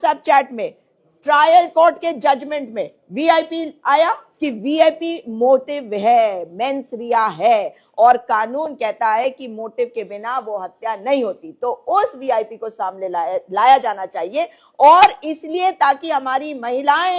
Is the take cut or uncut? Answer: uncut